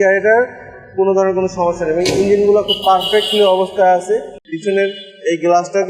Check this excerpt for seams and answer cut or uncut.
cut